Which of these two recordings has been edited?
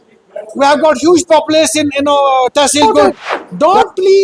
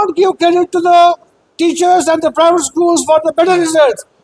first; 1 cut; at 2.8 s

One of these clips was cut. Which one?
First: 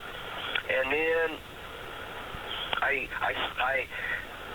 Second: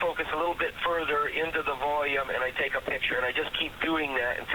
first; 1 cut; at 2.9 s

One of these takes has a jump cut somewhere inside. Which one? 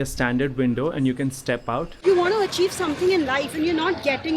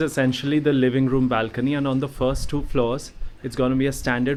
first; 1 cut; at 1.9 s

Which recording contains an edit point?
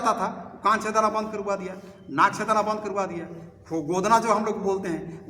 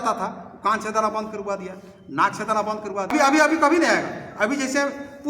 second; 1 cut; at 3.1 s

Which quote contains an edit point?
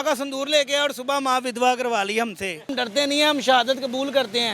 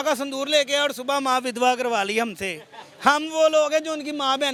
first; 1 cut; at 2.7 s

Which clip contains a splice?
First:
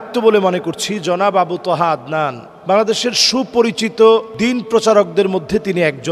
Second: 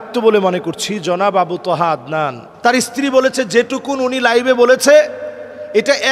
second; 1 cut; at 2.4 s

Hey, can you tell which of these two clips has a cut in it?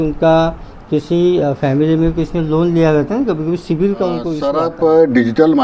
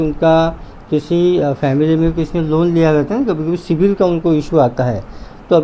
first; 1 cut; at 4.3 s

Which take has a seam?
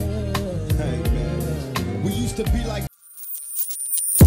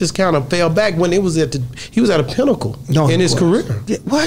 first; 1 cut; at 2.9 s

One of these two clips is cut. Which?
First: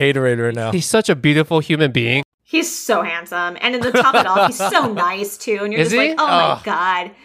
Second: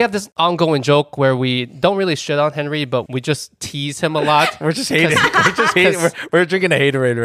first; 1 cut; at 2.3 s

